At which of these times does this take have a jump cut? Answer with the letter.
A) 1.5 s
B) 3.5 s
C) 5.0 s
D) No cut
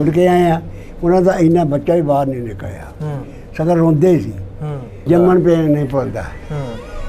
C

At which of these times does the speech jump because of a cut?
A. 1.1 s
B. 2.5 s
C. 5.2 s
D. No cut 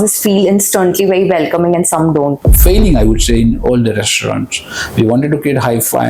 B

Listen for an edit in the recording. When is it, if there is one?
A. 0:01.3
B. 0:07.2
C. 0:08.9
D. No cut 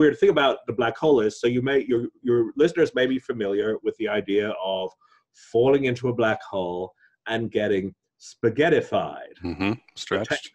D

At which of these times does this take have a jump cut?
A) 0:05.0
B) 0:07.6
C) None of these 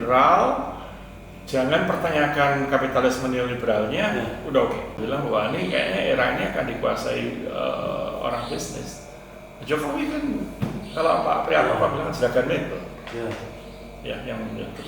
A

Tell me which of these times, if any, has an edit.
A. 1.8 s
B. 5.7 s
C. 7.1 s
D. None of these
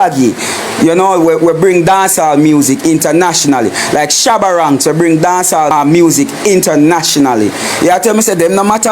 B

